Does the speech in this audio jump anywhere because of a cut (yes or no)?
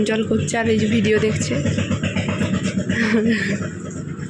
no